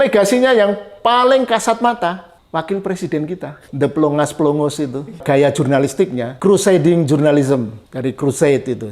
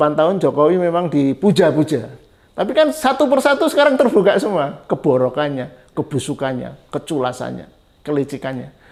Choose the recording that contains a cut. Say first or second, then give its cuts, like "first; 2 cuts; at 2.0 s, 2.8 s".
first; 5 cuts; at 2.3 s, 3.6 s, 5.2 s, 6.3 s, 7.8 s